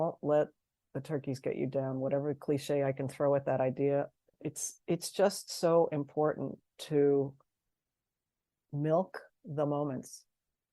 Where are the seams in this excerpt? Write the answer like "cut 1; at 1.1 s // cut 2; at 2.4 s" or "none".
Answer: cut 1; at 4.3 s